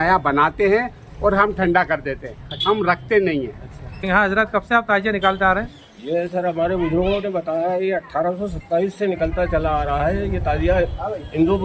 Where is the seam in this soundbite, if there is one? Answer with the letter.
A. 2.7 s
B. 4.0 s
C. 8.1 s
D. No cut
B